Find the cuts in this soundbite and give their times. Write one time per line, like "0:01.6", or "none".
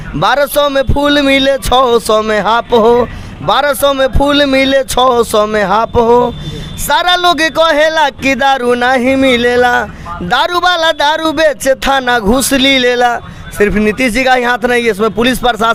none